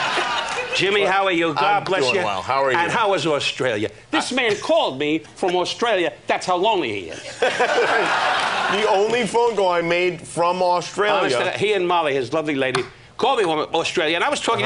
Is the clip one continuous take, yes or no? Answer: no